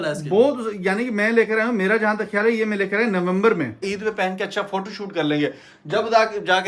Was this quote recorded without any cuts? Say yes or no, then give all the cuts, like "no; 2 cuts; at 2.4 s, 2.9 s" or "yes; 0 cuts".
no; 1 cut; at 3.8 s